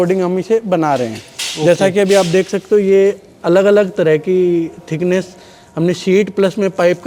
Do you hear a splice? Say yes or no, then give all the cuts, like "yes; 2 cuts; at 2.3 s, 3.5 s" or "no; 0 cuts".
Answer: no; 0 cuts